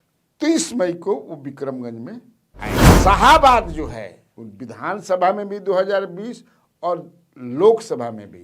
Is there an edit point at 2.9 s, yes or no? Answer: yes